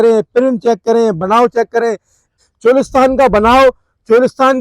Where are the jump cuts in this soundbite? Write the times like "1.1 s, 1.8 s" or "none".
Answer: 2.4 s